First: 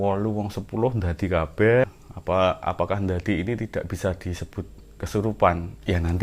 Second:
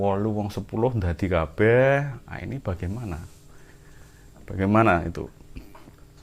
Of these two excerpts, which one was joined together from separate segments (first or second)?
first